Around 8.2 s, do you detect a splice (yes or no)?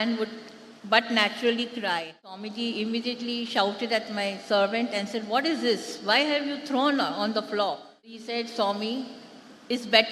yes